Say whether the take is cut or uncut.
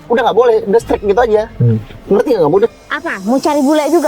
cut